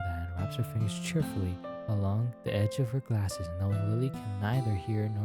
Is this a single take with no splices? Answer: yes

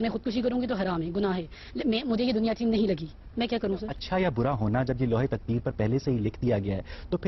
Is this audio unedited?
no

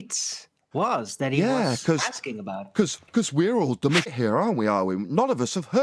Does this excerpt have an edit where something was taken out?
yes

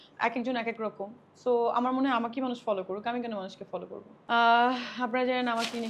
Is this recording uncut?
no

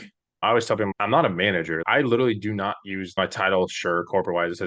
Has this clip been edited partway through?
yes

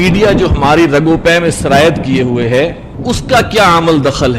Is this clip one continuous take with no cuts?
no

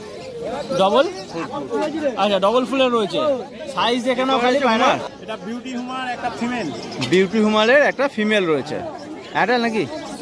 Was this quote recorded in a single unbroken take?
no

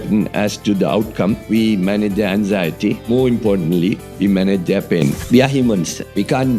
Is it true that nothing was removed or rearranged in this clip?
no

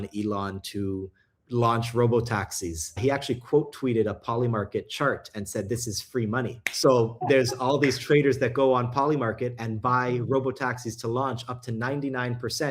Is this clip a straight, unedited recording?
no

